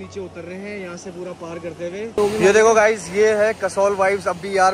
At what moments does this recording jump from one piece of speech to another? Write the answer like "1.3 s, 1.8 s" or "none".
2.1 s